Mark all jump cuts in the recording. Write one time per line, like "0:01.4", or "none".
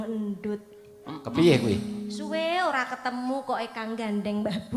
none